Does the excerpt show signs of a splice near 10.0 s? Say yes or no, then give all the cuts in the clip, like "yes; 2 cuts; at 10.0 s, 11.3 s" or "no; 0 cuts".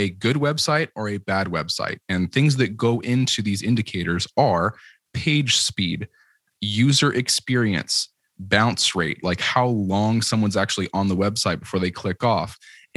no; 0 cuts